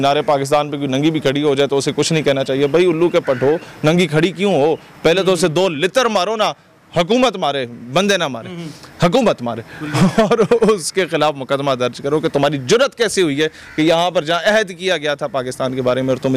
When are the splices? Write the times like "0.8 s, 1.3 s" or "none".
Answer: none